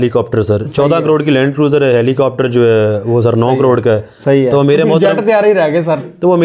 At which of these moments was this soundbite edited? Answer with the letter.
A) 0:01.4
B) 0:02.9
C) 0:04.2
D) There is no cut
D